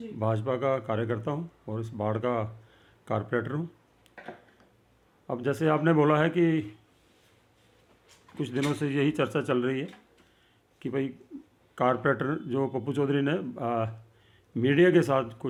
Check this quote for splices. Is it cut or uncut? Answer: uncut